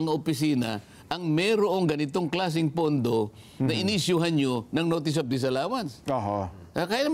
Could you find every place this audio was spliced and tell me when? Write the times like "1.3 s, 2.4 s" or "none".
none